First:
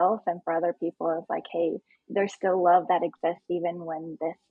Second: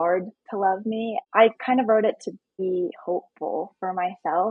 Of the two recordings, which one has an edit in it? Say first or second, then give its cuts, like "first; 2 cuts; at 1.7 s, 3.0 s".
second; 2 cuts; at 1.2 s, 2.6 s